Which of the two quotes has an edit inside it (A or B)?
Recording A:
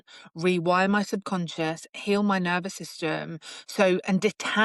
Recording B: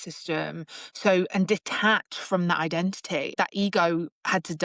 B